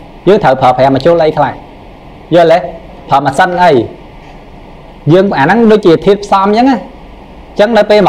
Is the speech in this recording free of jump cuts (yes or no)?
yes